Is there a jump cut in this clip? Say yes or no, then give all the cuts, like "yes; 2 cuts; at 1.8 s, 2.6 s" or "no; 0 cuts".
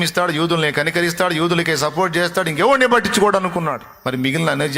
yes; 1 cut; at 3.9 s